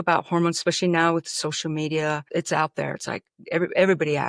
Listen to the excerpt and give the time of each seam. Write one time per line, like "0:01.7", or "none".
0:02.2